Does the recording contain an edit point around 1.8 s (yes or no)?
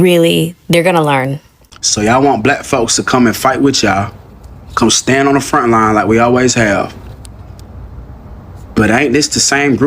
yes